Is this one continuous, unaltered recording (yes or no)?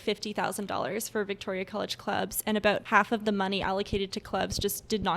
no